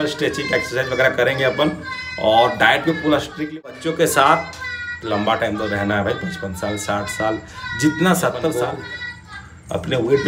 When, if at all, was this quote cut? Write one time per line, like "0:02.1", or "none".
0:03.6
0:08.5